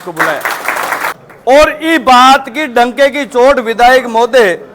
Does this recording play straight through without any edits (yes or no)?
no